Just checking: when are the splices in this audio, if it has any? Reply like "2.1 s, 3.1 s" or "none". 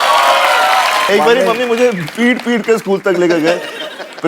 1.1 s